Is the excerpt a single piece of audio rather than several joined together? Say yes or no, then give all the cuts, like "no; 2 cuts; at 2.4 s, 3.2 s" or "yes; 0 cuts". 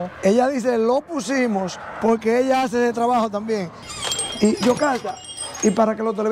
no; 1 cut; at 3.8 s